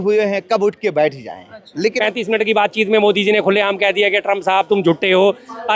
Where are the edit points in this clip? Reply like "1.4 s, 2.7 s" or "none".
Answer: 2.0 s